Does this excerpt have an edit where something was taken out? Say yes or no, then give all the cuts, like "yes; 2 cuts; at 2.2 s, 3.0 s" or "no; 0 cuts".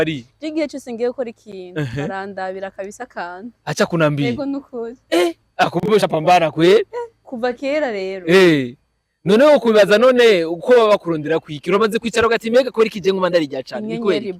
no; 0 cuts